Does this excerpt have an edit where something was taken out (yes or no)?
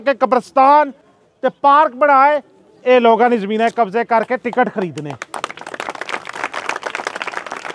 no